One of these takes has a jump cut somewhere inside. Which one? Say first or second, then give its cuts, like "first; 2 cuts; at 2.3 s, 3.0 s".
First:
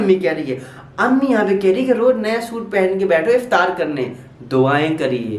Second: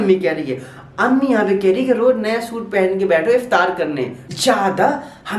second; 1 cut; at 4.3 s